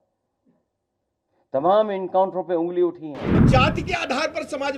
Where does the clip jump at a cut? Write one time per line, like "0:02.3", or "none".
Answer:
0:03.4